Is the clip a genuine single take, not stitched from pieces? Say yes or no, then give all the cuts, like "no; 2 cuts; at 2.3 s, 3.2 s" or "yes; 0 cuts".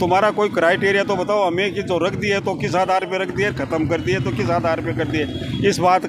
yes; 0 cuts